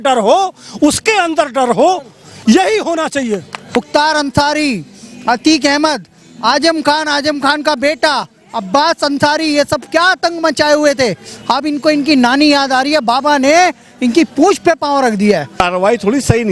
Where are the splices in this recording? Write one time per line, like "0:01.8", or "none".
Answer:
0:03.6
0:15.6